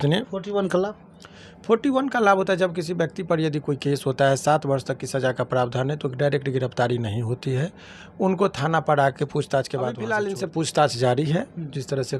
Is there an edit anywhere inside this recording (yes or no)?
yes